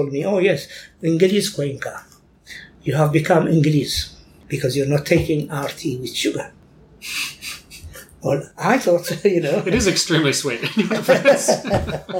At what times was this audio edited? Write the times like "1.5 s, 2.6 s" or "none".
4.4 s